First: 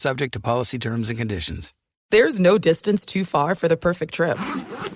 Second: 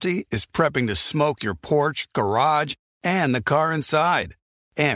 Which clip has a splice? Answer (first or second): first